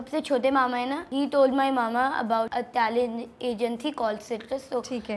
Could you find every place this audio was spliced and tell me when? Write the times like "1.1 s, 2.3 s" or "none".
1.0 s, 2.5 s